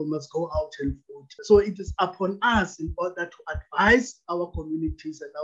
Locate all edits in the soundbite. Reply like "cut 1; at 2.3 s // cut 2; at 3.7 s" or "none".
cut 1; at 1.3 s